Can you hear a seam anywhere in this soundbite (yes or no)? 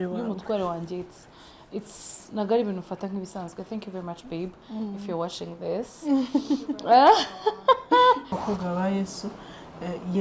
yes